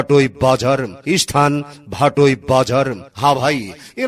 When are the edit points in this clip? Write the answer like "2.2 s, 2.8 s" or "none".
1.0 s, 3.0 s